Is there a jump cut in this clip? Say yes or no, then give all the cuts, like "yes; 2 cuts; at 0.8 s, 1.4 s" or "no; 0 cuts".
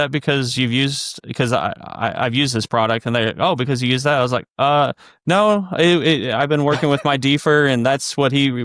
no; 0 cuts